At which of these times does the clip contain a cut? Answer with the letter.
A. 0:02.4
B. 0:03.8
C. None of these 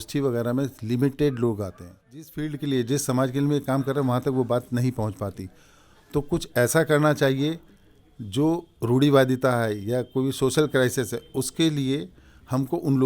A